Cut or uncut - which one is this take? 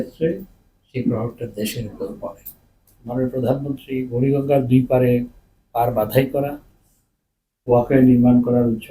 cut